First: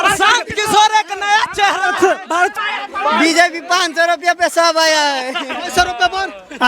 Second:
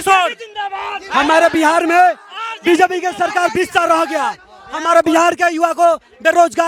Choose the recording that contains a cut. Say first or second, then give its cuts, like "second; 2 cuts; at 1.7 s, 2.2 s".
first; 1 cut; at 2.5 s